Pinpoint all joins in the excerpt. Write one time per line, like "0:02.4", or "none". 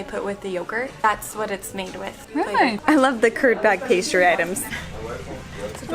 0:01.0
0:02.8